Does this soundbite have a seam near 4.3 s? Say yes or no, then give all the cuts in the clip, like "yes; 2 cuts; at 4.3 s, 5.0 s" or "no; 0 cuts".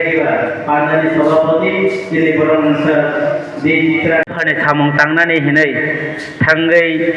yes; 1 cut; at 4.3 s